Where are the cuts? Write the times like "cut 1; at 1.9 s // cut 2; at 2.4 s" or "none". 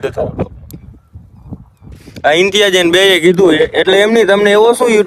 cut 1; at 1.9 s